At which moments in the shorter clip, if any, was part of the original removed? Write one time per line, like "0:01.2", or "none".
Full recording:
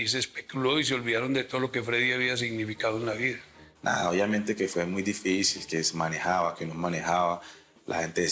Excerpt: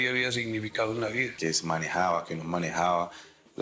0:01.3